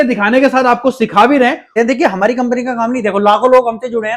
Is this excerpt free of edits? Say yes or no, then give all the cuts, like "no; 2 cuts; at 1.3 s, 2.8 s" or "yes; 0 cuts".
no; 1 cut; at 1.7 s